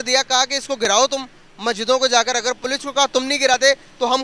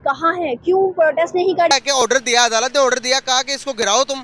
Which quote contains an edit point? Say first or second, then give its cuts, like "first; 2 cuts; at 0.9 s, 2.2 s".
second; 1 cut; at 1.7 s